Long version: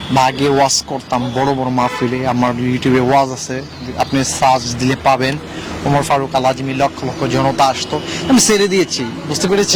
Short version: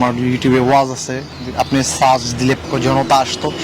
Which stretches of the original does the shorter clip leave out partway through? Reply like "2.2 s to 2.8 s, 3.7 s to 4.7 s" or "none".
5.0 s to 7.1 s